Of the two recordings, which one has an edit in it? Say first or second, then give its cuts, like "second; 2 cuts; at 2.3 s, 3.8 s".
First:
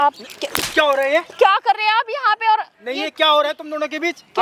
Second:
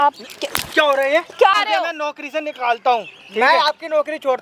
second; 1 cut; at 1.6 s